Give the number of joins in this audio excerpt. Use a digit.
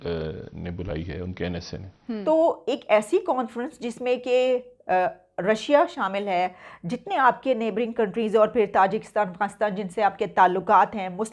1